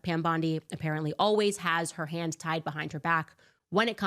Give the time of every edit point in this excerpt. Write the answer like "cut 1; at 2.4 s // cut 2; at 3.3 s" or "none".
none